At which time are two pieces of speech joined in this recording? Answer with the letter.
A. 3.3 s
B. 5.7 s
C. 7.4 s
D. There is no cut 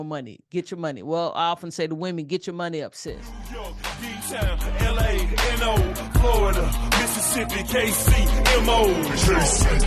A